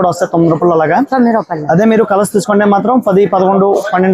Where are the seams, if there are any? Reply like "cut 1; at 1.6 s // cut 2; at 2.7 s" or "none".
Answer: none